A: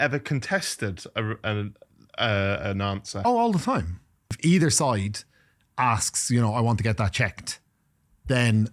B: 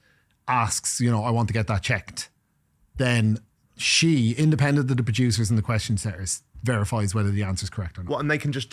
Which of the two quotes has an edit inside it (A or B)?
A